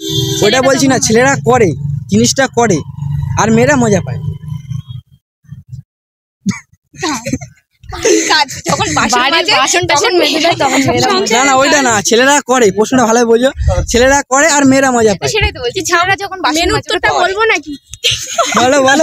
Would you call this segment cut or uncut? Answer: uncut